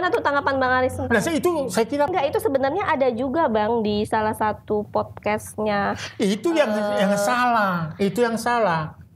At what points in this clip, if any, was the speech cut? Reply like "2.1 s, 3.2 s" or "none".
2.1 s